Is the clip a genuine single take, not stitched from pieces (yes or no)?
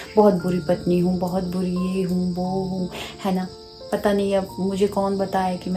yes